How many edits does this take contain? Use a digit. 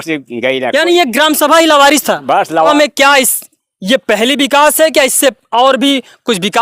1